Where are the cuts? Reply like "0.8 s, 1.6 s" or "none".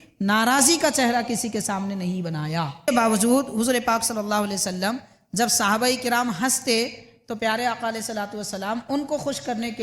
2.8 s